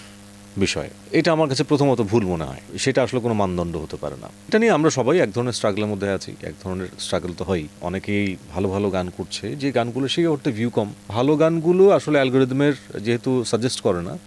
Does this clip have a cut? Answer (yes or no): yes